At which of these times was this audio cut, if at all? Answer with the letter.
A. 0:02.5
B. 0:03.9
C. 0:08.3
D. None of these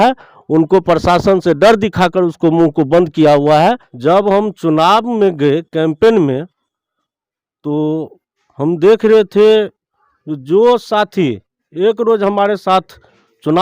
B